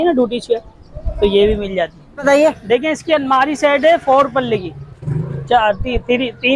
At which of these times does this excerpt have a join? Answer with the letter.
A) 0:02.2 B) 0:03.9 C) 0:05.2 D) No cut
A